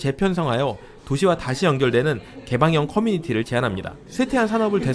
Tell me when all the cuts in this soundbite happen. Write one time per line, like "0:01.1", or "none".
none